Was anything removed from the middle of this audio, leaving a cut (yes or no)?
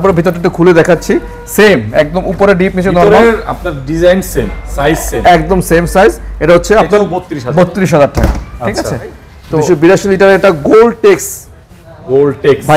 no